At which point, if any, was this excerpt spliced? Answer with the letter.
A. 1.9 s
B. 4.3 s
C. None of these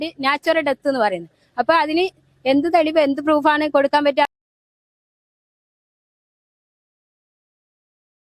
C